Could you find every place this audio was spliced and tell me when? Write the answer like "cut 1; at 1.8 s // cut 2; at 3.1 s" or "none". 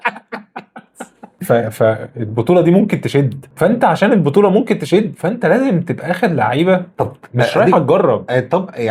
none